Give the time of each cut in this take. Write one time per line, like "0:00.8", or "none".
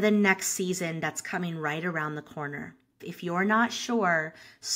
0:03.1